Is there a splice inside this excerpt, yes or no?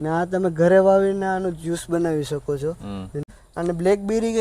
yes